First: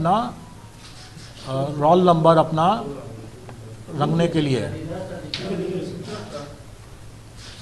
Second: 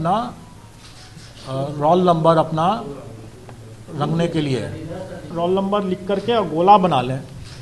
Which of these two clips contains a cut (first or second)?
second